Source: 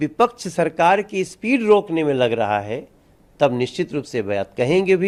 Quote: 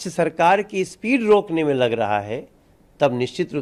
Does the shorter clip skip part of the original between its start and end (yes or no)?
no